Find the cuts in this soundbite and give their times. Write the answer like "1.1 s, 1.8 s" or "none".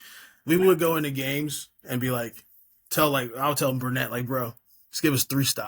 none